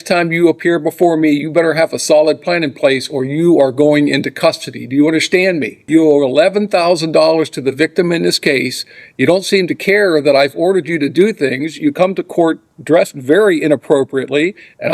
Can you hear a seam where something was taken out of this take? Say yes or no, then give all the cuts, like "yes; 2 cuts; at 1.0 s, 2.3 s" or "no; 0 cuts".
yes; 1 cut; at 5.8 s